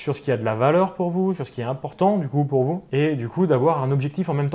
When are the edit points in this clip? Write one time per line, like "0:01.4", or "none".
none